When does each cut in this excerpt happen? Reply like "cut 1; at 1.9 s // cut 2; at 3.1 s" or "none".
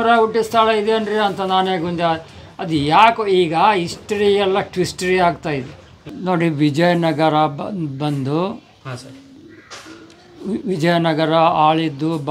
cut 1; at 6.0 s